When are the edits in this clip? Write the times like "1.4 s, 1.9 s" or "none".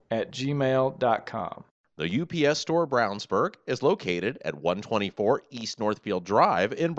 1.7 s